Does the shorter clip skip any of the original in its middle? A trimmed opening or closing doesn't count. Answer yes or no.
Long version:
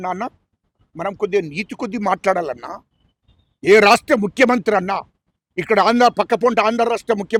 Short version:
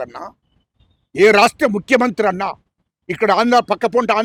no